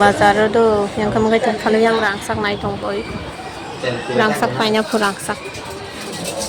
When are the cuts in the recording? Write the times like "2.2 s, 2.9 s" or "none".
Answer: none